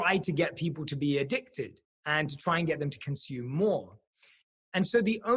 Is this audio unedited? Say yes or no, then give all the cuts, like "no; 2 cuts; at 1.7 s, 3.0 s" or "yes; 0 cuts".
yes; 0 cuts